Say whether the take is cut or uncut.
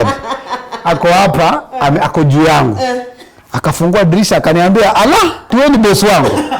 cut